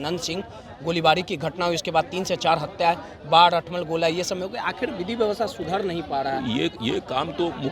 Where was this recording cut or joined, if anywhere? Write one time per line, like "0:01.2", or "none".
none